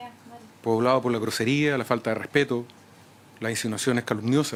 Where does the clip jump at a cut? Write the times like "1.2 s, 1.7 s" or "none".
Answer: none